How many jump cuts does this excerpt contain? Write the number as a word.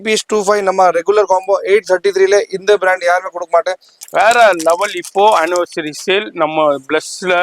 one